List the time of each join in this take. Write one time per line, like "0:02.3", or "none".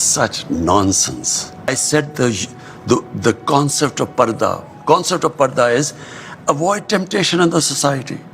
0:01.7